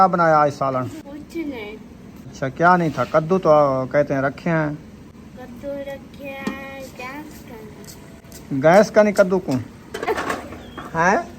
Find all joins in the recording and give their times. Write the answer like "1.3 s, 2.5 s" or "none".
1.0 s, 2.3 s, 10.1 s